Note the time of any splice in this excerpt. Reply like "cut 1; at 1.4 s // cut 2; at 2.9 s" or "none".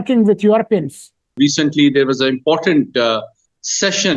cut 1; at 1.3 s